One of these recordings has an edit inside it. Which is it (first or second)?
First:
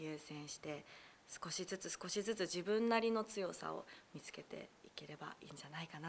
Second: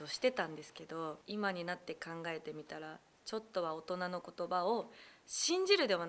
second